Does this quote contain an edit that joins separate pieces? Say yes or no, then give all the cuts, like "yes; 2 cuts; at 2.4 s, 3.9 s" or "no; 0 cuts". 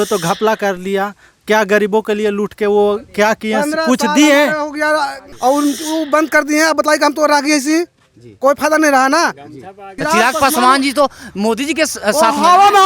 yes; 2 cuts; at 5.2 s, 9.9 s